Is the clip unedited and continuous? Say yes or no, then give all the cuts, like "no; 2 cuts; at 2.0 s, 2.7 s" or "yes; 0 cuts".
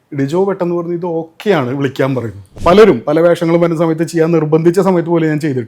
no; 1 cut; at 2.4 s